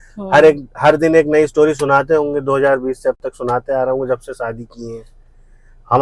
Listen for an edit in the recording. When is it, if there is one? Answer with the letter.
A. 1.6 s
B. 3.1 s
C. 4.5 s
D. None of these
D